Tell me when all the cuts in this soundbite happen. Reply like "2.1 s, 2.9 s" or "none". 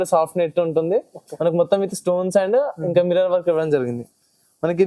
none